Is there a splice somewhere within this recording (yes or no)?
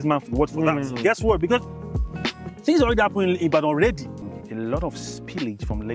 yes